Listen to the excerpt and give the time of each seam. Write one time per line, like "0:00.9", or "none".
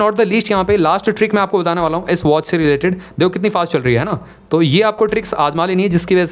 none